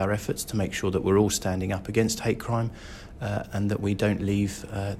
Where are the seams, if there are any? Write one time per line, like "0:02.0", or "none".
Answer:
none